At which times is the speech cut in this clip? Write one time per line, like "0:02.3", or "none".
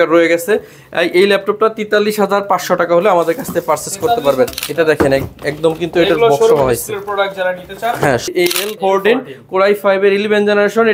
0:04.5
0:08.3